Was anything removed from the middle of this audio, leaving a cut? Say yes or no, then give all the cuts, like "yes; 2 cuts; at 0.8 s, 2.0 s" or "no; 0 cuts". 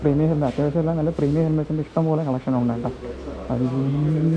no; 0 cuts